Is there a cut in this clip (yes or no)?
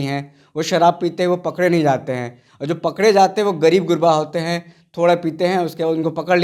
no